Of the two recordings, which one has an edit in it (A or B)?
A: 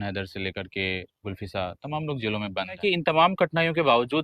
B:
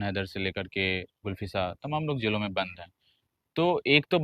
A